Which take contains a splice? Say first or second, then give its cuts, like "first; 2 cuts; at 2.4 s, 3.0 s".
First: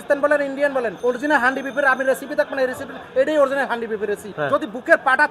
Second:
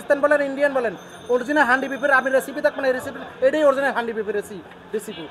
first; 2 cuts; at 0.9 s, 4.3 s